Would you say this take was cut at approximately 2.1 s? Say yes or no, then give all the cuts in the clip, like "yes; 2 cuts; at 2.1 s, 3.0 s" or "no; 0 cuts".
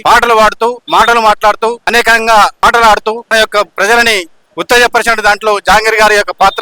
yes; 3 cuts; at 0.8 s, 2.1 s, 3.3 s